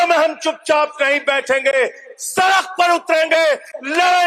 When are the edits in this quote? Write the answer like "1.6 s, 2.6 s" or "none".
none